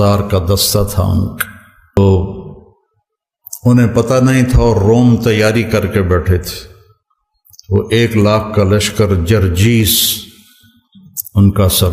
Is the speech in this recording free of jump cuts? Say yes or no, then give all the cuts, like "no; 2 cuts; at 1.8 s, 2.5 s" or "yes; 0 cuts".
no; 1 cut; at 2.0 s